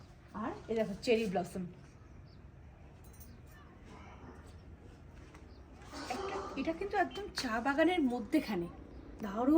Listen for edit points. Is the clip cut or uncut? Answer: uncut